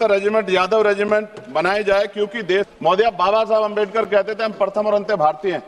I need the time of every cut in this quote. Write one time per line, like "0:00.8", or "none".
0:02.7